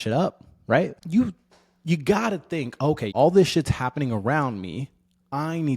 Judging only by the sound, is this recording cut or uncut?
cut